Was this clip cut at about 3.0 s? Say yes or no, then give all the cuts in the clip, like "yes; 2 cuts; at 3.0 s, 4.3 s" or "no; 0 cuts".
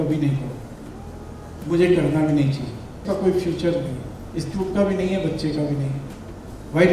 yes; 1 cut; at 3.0 s